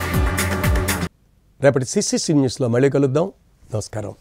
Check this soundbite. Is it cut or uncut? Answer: uncut